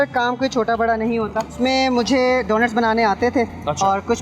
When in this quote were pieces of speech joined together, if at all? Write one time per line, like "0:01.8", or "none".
0:01.6